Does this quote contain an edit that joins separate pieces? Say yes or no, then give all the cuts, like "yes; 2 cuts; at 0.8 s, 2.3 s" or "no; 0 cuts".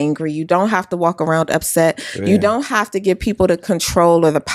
no; 0 cuts